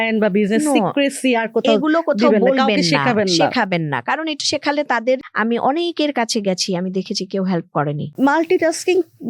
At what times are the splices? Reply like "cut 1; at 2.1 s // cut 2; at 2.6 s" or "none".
cut 1; at 5.2 s // cut 2; at 8.1 s